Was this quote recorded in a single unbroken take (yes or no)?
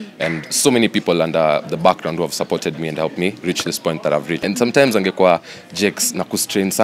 no